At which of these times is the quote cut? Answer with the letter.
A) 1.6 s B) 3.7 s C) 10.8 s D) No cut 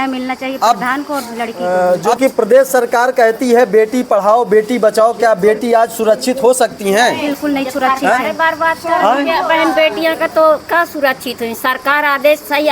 A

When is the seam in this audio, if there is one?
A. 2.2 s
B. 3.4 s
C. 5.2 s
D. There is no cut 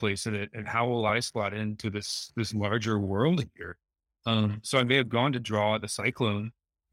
D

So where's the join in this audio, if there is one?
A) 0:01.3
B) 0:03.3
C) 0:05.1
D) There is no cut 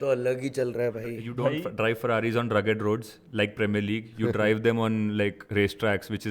A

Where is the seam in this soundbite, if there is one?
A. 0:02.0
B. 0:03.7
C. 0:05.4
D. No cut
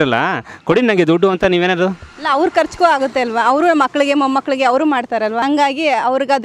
C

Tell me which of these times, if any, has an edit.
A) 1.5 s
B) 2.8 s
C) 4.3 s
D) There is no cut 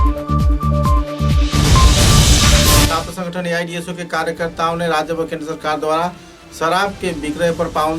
B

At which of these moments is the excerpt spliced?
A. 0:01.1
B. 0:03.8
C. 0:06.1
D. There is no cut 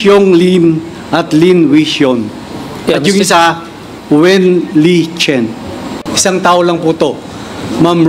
C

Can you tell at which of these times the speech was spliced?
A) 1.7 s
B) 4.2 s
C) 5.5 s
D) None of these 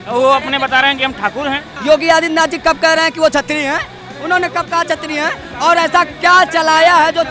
A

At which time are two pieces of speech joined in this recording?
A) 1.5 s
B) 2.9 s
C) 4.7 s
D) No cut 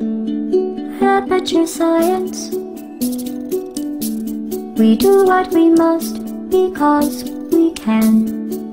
D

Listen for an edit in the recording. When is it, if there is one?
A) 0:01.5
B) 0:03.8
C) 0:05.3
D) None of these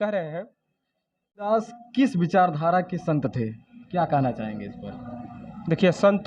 A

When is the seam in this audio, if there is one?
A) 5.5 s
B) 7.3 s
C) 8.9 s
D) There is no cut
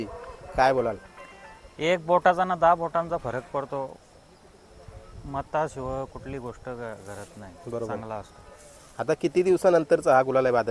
D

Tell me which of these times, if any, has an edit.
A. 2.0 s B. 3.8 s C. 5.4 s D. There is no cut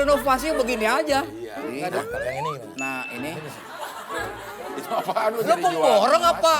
A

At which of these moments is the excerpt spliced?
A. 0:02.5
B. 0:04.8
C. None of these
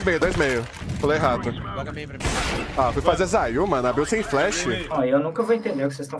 B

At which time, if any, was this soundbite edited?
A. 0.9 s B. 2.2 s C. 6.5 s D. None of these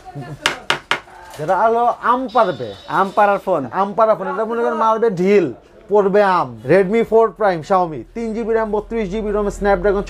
C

